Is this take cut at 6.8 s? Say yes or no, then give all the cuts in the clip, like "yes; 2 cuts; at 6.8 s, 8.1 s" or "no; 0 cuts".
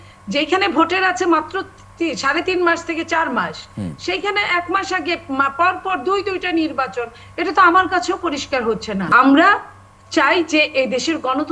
no; 1 cut; at 9.1 s